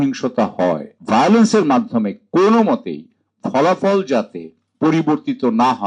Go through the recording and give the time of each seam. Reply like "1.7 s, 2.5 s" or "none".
0.9 s

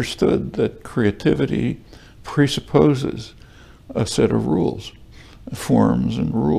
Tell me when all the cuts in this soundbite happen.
none

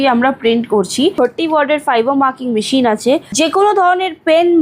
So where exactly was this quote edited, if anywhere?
1.1 s, 3.3 s

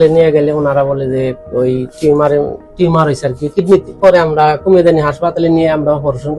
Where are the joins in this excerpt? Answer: 4.0 s

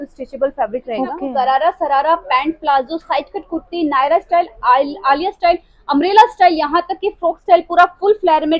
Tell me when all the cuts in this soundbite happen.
1.1 s

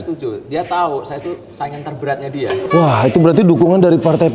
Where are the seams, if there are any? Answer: 2.6 s

